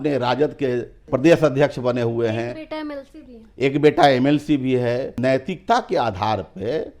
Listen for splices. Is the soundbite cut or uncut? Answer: cut